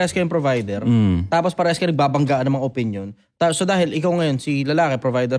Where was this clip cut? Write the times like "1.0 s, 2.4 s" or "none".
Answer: none

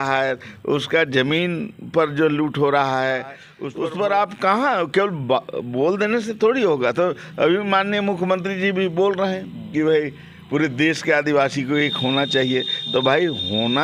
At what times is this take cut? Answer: none

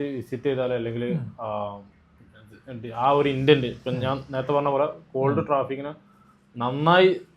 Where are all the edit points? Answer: none

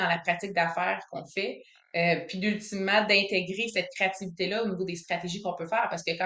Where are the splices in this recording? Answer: none

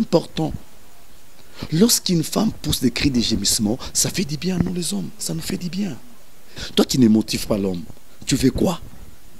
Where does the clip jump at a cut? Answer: 6.5 s

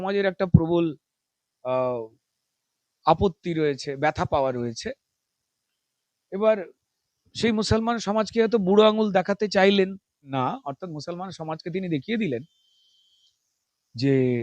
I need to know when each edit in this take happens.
10.3 s

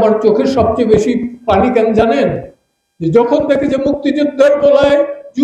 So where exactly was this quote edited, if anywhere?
none

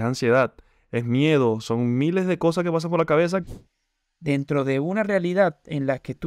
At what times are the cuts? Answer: 3.4 s

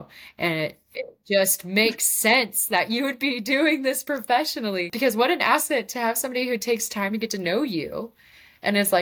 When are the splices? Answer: none

